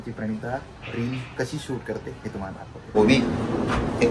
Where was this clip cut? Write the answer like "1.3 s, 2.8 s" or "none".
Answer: 2.9 s